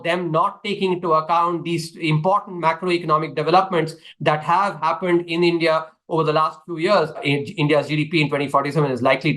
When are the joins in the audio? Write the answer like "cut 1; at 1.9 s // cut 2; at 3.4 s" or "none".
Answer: cut 1; at 7.2 s